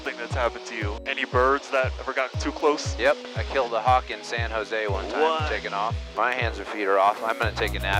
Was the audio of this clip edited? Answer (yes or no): yes